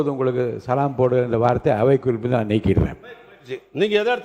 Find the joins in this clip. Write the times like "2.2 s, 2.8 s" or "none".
none